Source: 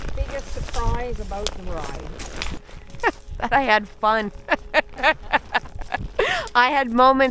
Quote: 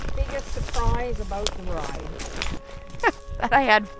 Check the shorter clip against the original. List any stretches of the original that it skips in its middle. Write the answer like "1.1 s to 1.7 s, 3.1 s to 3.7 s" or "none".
none

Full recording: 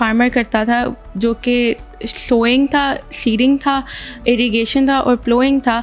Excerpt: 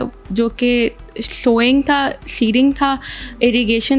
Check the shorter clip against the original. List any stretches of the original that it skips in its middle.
none

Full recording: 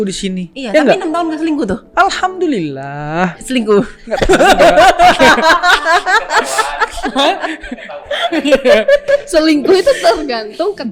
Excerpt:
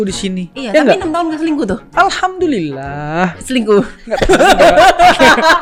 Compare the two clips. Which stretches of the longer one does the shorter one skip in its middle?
none

